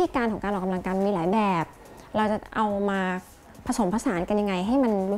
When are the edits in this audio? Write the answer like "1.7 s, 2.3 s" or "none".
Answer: none

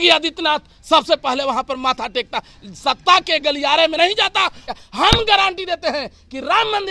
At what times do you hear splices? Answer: 4.7 s

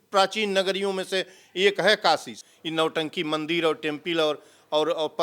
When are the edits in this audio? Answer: 2.3 s

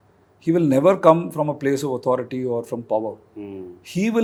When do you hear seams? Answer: none

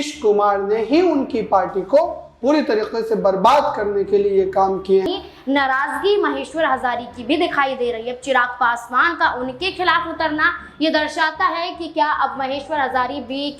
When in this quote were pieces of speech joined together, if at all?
5.1 s

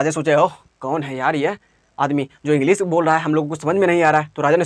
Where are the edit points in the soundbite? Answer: none

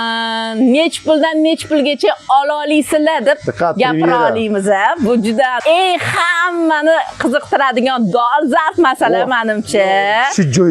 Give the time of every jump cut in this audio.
5.6 s

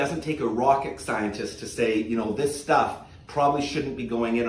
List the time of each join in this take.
none

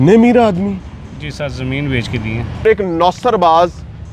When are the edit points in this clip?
2.6 s

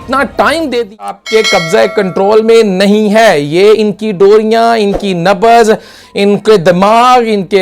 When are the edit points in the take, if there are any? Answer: 1.0 s

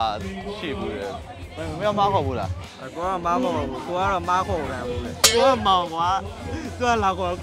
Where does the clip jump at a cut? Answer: 1.5 s, 5.2 s

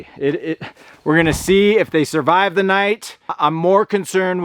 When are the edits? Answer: 3.3 s

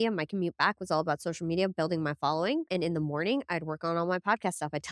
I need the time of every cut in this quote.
2.7 s

